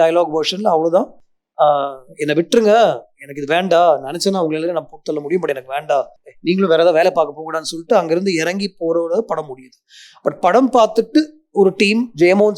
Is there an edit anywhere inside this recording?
no; 0 cuts

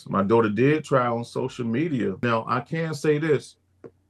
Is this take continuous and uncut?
no; 1 cut; at 2.2 s

